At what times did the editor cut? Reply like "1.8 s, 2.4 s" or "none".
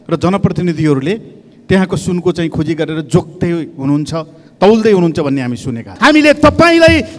5.9 s